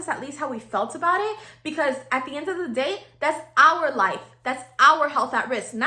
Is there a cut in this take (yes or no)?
no